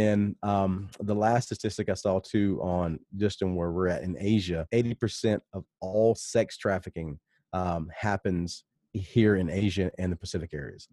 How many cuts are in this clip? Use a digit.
1